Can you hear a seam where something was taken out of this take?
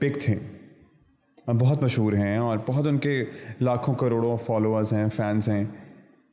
no; 0 cuts

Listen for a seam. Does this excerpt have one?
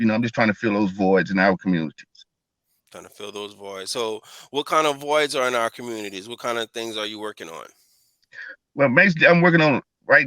no; 0 cuts

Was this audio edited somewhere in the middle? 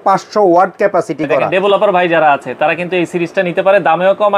yes; 1 cut; at 1.5 s

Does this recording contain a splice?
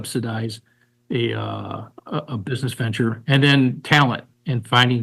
no; 0 cuts

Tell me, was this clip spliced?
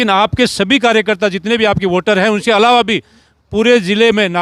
no; 0 cuts

